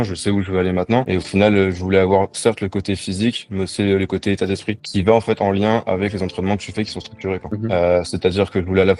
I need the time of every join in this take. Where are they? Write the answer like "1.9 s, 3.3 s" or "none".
1.1 s, 4.9 s, 7.5 s